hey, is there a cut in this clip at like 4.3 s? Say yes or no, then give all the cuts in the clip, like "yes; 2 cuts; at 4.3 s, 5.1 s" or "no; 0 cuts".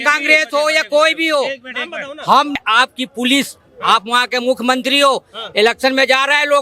no; 1 cut; at 2.6 s